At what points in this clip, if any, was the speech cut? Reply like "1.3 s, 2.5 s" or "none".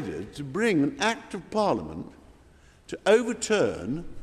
none